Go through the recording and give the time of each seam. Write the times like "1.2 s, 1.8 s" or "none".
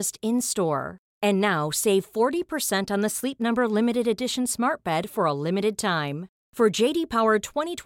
none